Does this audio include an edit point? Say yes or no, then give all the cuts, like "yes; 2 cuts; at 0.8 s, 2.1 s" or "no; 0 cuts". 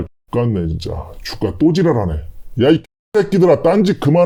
no; 0 cuts